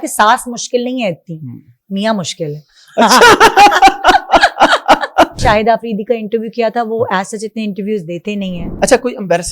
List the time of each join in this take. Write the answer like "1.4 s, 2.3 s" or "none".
5.4 s, 8.6 s